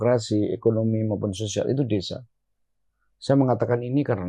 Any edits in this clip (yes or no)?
no